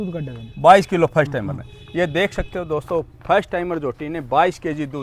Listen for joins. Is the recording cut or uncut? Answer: uncut